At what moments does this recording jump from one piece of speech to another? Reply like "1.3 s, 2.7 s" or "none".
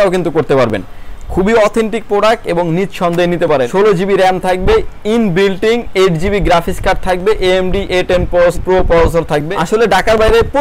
3.7 s, 8.6 s, 9.5 s

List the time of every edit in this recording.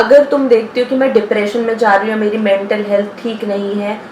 none

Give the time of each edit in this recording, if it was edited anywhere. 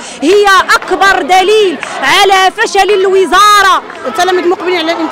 4.0 s

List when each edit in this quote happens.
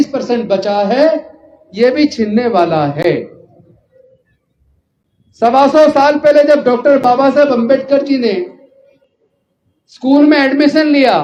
none

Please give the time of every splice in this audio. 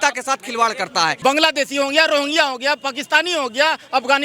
1.2 s

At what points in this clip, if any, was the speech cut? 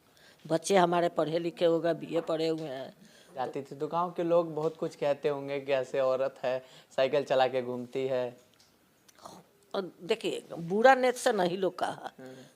3.3 s

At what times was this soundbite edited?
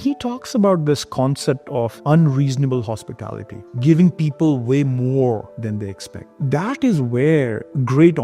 none

